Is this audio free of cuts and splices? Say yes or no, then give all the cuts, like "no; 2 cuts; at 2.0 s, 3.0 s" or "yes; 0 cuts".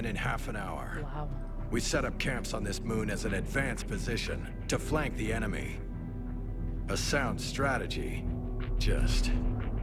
yes; 0 cuts